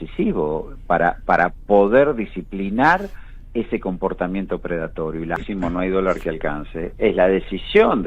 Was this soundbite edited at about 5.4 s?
yes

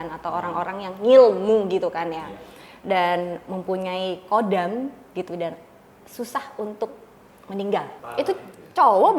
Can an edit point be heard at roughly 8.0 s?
yes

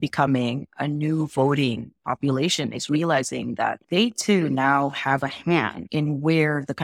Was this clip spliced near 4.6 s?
no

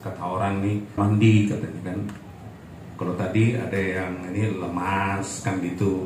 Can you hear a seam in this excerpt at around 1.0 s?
yes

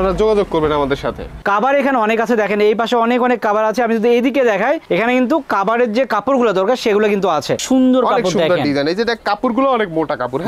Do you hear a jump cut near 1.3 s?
yes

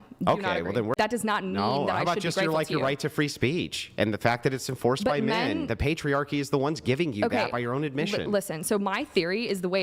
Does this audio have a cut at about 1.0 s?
yes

